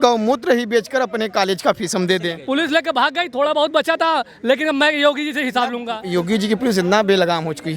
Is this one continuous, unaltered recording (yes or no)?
no